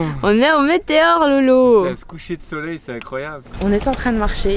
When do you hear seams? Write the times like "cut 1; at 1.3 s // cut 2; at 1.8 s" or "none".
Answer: cut 1; at 3.6 s